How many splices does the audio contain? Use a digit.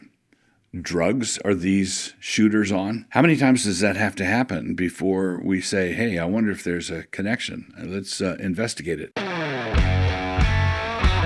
2